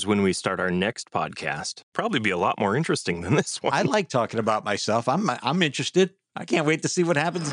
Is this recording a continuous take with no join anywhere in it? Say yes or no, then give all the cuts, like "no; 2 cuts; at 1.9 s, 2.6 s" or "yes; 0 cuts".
no; 2 cuts; at 1.9 s, 3.9 s